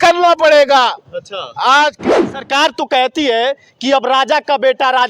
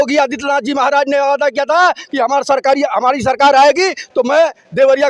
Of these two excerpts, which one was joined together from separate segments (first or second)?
first